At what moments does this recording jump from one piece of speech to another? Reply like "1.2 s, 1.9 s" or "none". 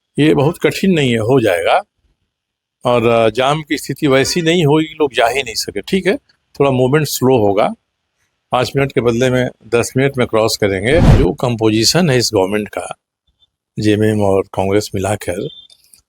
11.1 s

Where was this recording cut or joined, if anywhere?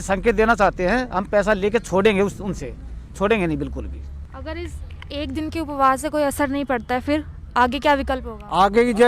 none

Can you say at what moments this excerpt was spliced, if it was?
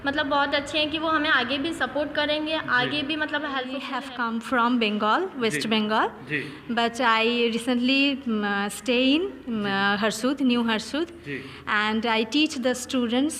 3.9 s

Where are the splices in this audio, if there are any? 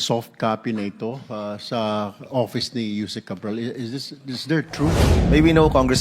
5.0 s

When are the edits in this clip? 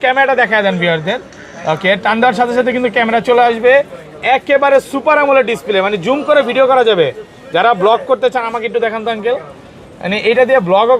none

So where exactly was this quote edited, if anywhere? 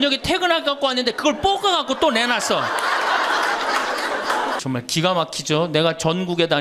4.6 s

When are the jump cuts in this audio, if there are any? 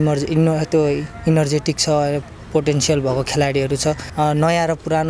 4.0 s

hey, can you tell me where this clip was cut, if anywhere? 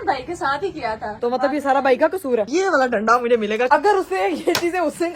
1.1 s, 2.5 s, 3.7 s

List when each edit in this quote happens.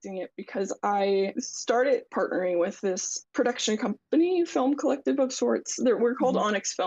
1.5 s

